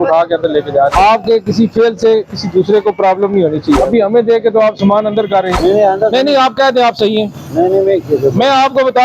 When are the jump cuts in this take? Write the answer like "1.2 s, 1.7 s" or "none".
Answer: 0.9 s, 3.8 s, 5.5 s